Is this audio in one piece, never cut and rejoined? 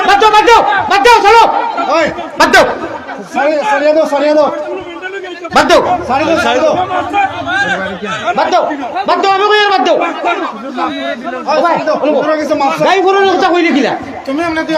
yes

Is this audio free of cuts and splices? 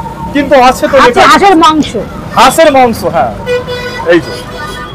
yes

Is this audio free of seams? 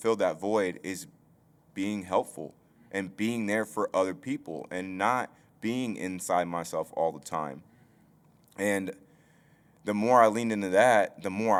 yes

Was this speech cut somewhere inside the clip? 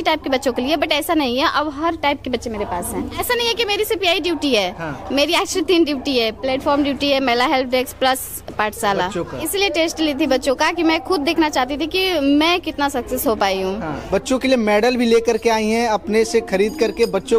yes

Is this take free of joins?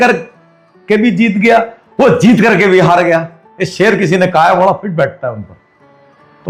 yes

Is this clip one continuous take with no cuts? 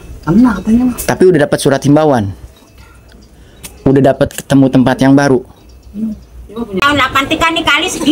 no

